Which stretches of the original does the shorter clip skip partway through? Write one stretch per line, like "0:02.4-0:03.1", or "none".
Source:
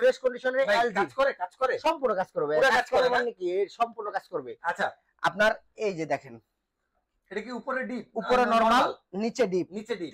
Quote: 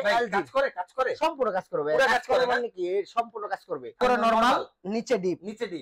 0:04.6-0:08.2